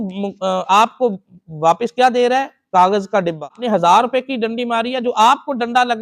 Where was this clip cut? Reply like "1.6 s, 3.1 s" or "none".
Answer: 3.6 s